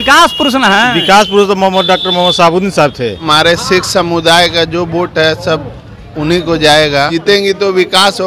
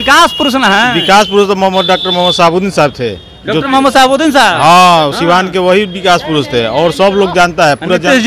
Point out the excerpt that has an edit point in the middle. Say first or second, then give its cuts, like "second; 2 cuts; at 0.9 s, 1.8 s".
first; 2 cuts; at 3.2 s, 7.1 s